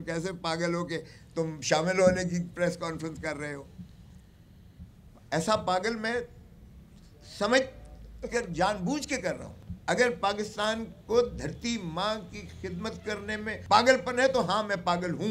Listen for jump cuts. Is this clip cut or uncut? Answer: uncut